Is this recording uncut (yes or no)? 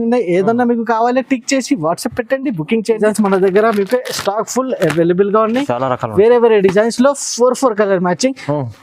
no